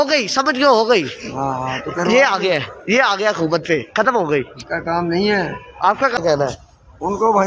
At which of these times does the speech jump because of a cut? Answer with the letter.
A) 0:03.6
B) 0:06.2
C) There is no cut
B